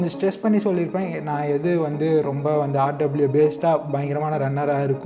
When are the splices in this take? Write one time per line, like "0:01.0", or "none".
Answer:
none